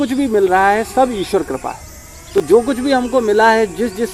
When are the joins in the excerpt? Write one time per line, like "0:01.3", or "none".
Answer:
none